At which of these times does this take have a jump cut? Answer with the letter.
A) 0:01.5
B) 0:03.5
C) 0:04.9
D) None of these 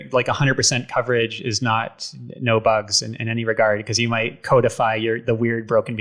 D